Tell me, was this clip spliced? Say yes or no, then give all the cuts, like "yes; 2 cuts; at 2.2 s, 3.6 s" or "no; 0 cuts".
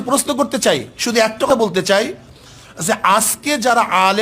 yes; 1 cut; at 1.5 s